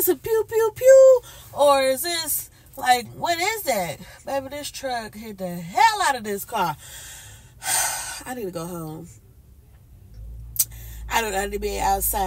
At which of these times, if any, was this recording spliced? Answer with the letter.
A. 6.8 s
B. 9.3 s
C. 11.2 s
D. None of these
D